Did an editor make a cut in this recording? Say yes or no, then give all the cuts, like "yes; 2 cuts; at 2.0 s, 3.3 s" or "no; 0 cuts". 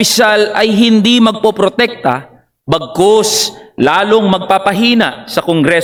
no; 0 cuts